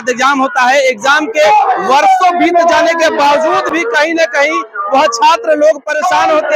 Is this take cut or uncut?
uncut